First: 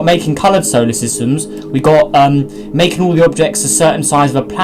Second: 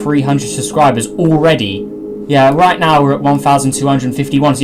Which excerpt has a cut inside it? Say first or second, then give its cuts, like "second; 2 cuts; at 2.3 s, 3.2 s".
first; 1 cut; at 2.8 s